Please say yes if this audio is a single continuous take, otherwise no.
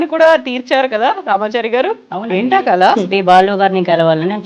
no